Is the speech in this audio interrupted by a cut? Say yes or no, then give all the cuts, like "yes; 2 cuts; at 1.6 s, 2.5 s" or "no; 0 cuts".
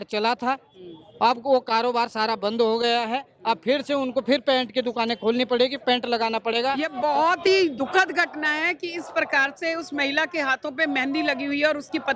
yes; 1 cut; at 6.9 s